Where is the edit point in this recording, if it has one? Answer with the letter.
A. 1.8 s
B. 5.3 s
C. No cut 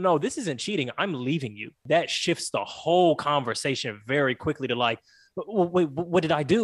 A